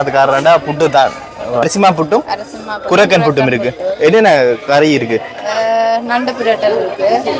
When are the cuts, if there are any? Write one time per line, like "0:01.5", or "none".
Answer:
0:01.6